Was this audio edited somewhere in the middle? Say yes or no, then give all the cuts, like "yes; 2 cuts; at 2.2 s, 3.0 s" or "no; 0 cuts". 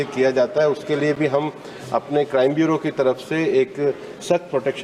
no; 0 cuts